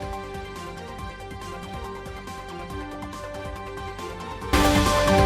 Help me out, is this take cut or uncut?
cut